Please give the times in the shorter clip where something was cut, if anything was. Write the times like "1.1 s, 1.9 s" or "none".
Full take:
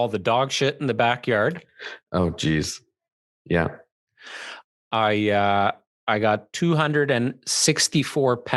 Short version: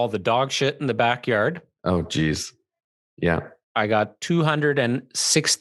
1.7 s, 3.6 s